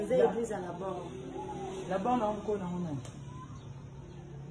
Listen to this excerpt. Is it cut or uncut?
uncut